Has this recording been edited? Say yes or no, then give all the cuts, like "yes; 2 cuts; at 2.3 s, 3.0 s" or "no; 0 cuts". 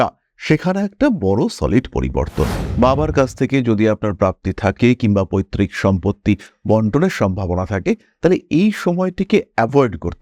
yes; 1 cut; at 2.6 s